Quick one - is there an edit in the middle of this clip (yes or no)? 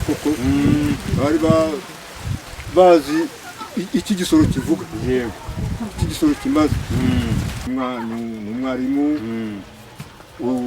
yes